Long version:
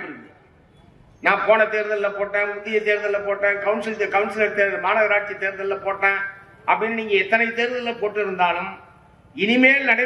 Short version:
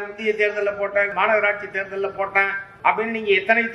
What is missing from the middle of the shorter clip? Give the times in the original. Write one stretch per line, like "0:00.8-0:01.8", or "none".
0:03.6-0:04.8
0:06.3-0:06.5